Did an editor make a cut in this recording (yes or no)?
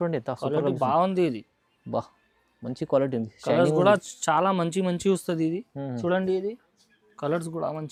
no